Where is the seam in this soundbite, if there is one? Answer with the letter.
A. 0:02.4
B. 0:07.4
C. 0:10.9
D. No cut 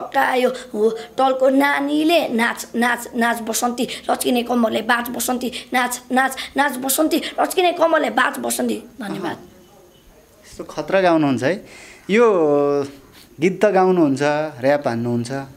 D